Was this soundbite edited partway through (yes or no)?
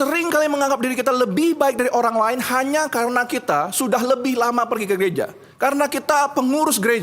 yes